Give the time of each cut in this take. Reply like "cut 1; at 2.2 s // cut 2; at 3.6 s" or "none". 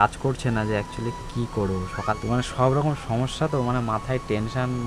cut 1; at 2.2 s

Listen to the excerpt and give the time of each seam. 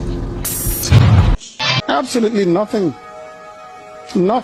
none

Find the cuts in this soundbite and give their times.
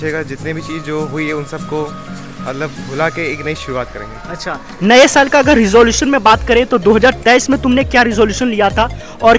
none

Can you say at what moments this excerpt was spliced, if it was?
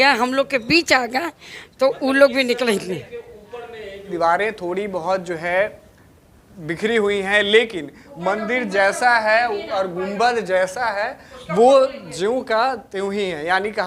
cut 1; at 4.1 s

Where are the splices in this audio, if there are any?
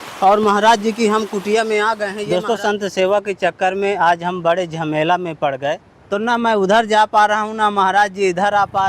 cut 1; at 2.1 s // cut 2; at 5.9 s

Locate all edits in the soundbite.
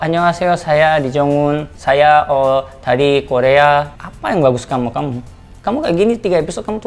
cut 1; at 1.7 s // cut 2; at 4.0 s

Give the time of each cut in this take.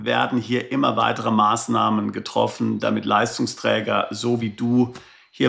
none

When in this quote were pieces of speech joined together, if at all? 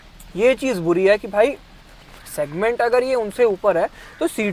none

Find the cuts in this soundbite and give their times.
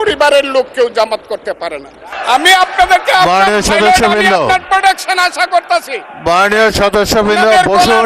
cut 1; at 2.0 s

